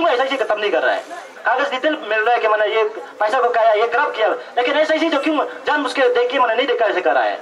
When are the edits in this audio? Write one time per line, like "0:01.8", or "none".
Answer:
0:01.3